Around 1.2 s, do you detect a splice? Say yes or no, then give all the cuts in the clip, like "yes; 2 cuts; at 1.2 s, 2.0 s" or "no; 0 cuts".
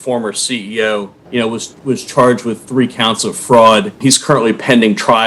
yes; 2 cuts; at 1.2 s, 4.0 s